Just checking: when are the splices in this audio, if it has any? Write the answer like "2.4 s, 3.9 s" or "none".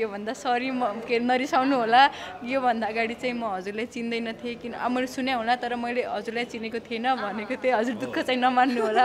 none